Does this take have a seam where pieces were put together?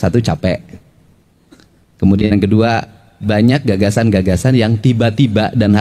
no; 0 cuts

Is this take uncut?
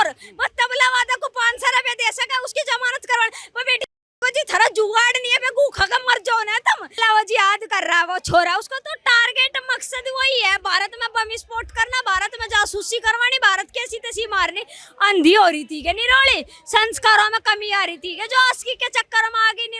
no; 1 cut; at 7.0 s

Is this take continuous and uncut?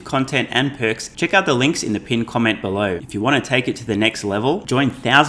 no; 2 cuts; at 1.1 s, 3.0 s

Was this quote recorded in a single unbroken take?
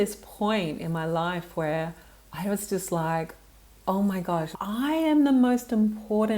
no; 1 cut; at 4.5 s

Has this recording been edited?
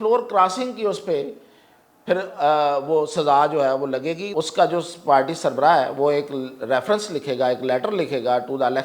yes; 1 cut; at 4.3 s

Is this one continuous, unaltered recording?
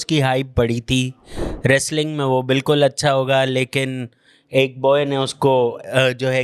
yes; 0 cuts

